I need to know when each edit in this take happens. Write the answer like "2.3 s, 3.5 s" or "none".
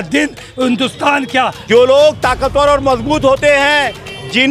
1.6 s